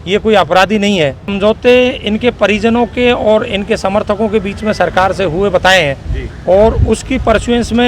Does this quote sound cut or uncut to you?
cut